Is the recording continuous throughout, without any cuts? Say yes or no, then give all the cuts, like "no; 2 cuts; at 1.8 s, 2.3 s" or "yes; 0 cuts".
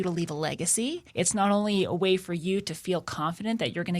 no; 1 cut; at 1.0 s